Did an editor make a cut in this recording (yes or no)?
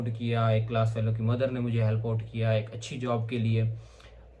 no